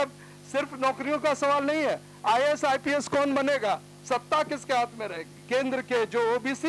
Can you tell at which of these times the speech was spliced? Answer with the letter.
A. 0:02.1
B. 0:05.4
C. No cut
B